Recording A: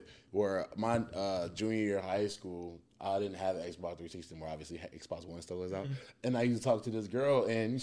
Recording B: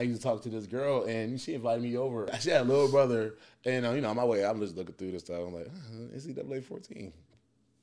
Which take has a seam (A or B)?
B